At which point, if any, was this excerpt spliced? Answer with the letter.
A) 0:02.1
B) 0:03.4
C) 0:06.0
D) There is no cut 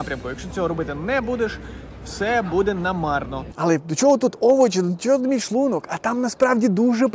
B